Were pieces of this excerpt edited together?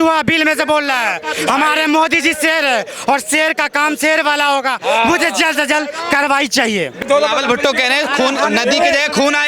yes; 1 cut; at 6.9 s

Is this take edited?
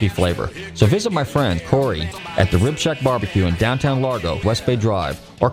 yes; 2 cuts; at 1.8 s, 4.4 s

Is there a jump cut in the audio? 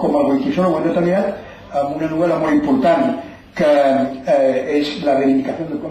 no; 0 cuts

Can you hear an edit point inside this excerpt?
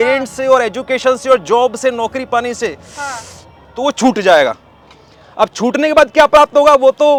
no; 0 cuts

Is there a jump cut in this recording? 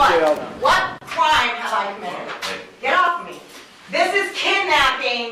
no; 0 cuts

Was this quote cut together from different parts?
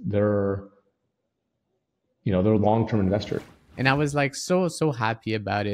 yes; 1 cut; at 3.5 s

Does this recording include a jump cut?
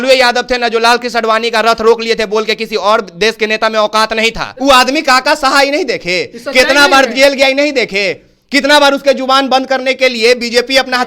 yes; 1 cut; at 4.5 s

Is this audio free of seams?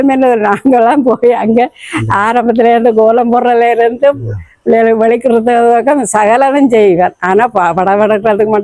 yes; 0 cuts

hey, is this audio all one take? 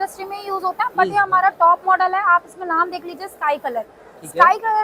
yes; 0 cuts

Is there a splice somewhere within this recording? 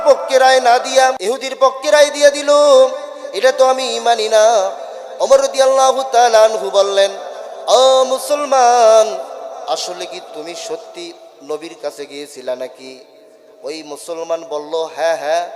yes; 1 cut; at 1.2 s

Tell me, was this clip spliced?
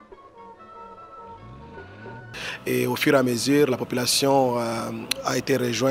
yes; 1 cut; at 2.3 s

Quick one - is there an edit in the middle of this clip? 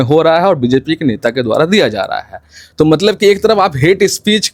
no; 0 cuts

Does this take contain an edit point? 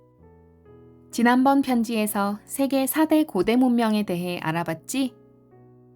yes; 1 cut; at 1.1 s

